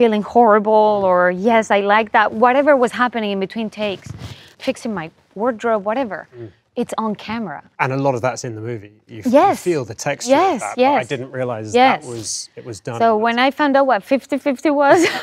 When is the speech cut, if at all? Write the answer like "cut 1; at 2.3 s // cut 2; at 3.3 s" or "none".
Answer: cut 1; at 4.5 s // cut 2; at 7.7 s